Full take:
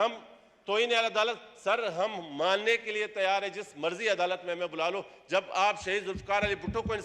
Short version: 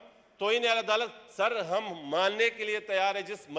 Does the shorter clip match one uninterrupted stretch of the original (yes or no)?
yes